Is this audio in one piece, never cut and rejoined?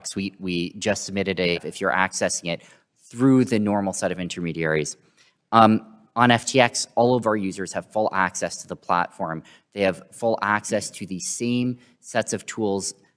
no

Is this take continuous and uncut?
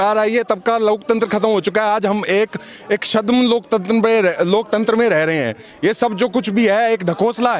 yes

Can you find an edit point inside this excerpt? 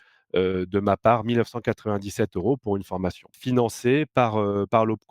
yes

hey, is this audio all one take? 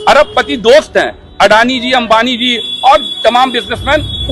yes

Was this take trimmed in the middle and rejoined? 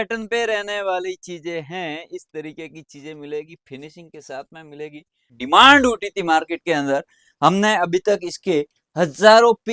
yes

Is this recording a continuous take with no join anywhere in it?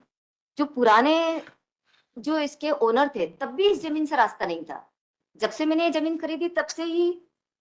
yes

